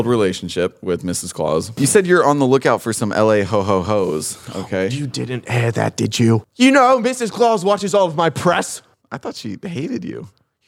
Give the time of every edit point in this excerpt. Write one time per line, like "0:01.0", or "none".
0:01.7